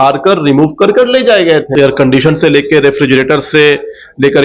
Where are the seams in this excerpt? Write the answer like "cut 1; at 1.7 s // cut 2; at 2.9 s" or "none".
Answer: cut 1; at 1.7 s